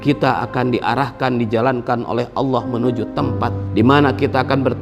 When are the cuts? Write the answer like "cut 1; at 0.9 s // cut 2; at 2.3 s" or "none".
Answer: cut 1; at 3.6 s